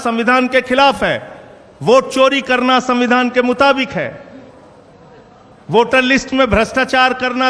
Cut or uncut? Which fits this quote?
uncut